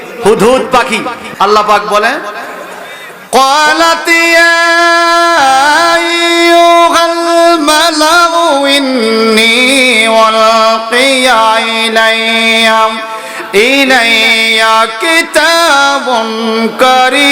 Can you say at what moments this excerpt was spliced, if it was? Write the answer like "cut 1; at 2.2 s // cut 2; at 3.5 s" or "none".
cut 1; at 1.2 s